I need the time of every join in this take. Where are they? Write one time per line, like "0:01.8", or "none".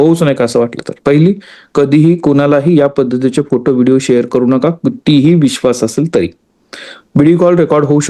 none